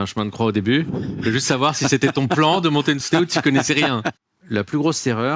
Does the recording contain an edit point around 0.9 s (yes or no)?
no